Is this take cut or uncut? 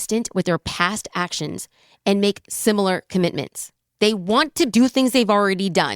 cut